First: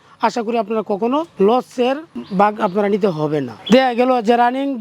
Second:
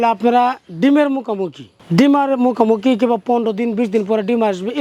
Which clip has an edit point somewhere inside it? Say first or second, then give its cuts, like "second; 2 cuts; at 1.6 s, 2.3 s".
first; 1 cut; at 3.6 s